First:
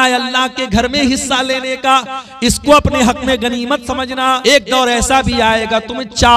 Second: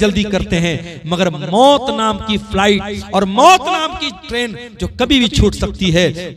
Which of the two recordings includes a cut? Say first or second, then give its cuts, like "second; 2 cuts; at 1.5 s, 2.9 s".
first; 1 cut; at 4.4 s